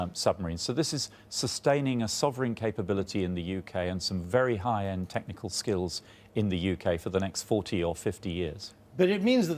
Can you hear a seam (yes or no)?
yes